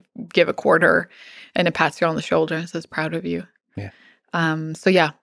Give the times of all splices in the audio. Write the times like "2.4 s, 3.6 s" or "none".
none

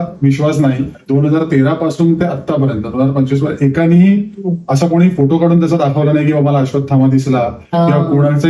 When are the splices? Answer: 0.9 s

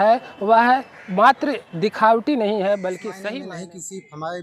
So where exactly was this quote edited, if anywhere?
3.3 s

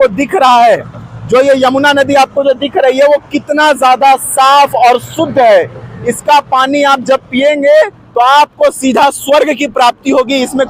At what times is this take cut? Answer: none

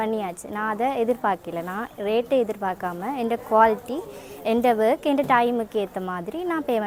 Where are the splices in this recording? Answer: none

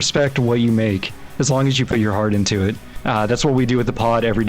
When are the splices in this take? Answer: 2.9 s

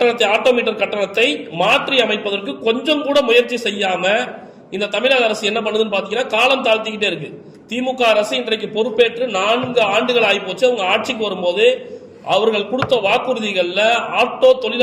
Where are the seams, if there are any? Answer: none

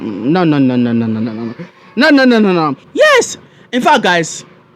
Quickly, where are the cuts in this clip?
2.8 s

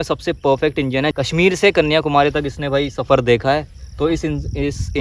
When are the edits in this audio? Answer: none

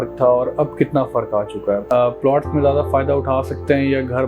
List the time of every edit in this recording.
1.8 s

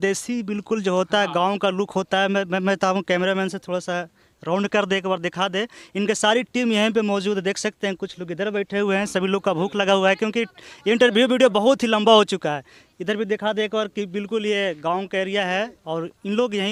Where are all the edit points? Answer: none

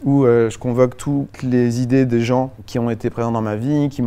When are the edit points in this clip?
1.3 s, 2.6 s

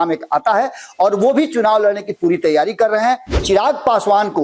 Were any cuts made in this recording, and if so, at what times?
3.3 s

